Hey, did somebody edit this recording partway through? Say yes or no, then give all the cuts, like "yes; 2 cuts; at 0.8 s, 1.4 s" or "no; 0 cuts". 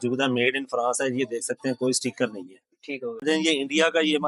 no; 0 cuts